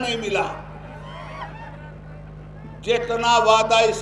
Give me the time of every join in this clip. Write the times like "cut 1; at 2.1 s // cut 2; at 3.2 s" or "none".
none